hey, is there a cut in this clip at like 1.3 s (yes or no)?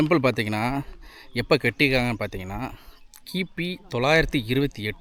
no